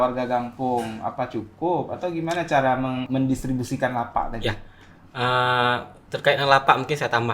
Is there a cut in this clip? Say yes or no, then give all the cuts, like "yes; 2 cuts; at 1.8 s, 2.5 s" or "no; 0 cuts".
yes; 1 cut; at 3.1 s